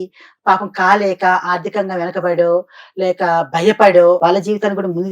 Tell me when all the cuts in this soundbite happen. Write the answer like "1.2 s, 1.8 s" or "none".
4.2 s